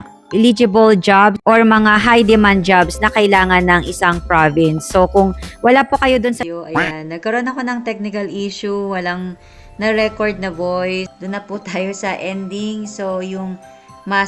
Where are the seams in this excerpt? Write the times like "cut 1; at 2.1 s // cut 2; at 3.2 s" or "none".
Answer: cut 1; at 6.4 s // cut 2; at 11.1 s

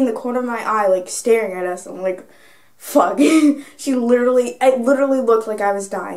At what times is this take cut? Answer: none

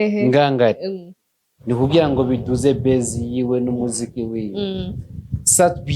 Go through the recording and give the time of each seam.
none

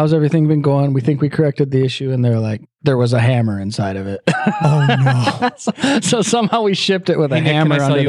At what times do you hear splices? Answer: none

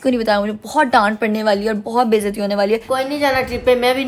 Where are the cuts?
cut 1; at 2.9 s

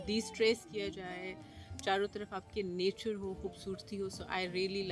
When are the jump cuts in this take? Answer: none

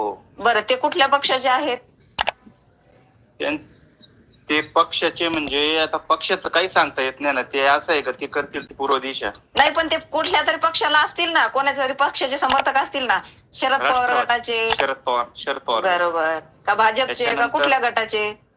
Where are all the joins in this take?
none

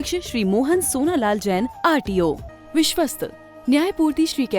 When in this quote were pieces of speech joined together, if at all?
cut 1; at 2.5 s

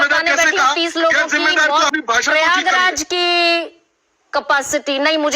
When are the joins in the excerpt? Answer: cut 1; at 1.9 s // cut 2; at 3.4 s

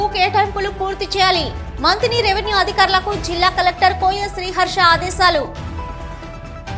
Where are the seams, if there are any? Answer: none

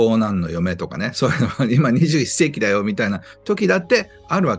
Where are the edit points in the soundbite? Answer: none

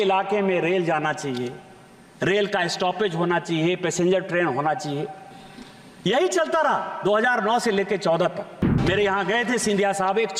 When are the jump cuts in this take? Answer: cut 1; at 8.7 s

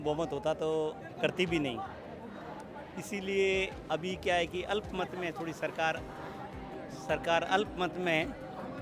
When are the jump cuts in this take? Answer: none

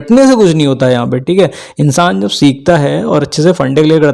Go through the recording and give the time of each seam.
none

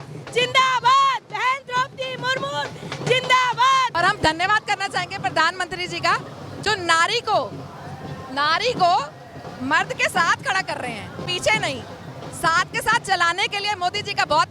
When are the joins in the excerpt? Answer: cut 1; at 3.9 s

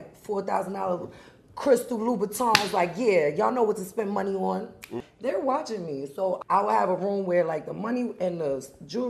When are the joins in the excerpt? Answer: cut 1; at 5.0 s // cut 2; at 6.4 s

